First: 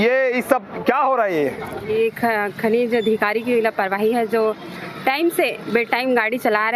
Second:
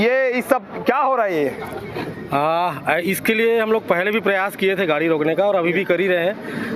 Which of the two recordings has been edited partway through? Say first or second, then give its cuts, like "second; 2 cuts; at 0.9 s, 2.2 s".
first; 1 cut; at 1.7 s